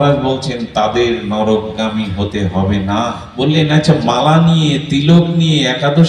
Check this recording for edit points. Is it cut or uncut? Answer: cut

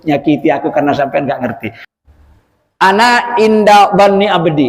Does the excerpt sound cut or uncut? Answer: cut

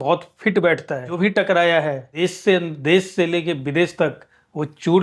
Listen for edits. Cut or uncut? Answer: cut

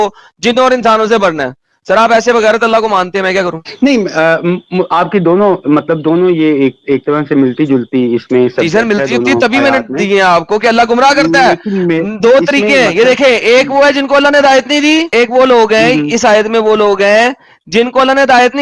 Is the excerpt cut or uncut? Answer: uncut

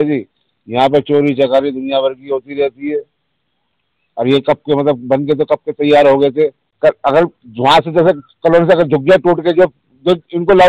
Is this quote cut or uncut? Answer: cut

